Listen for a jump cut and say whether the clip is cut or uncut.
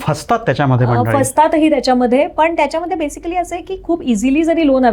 uncut